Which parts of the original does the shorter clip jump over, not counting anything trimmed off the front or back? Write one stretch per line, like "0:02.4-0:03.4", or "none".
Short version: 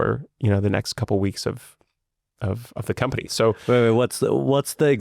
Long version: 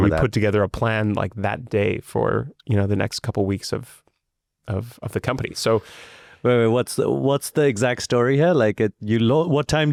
0:05.9-0:06.4